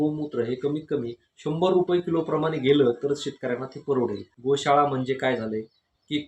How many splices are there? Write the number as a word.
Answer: one